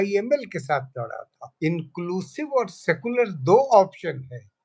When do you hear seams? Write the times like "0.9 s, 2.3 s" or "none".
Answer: 1.4 s